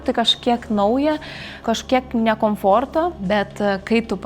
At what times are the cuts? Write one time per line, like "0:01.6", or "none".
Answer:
0:01.6
0:03.2